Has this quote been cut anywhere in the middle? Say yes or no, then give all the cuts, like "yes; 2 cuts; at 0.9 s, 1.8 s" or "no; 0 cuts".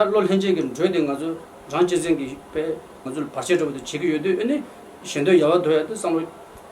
yes; 1 cut; at 3.1 s